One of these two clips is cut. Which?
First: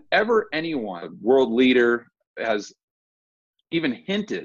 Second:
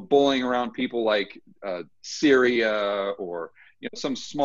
first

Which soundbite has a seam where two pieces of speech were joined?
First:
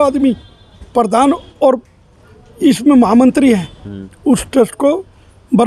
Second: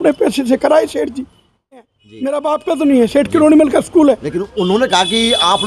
second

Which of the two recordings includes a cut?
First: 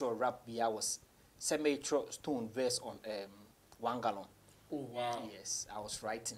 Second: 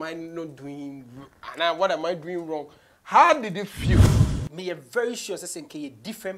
second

